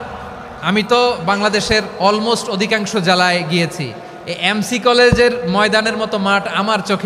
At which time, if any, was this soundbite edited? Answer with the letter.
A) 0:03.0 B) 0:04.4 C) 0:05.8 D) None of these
D